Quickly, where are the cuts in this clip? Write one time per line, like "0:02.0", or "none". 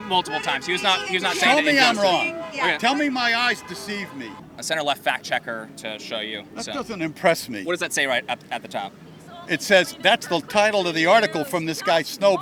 none